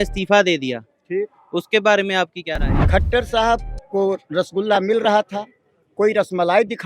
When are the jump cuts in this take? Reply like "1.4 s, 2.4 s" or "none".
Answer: 2.7 s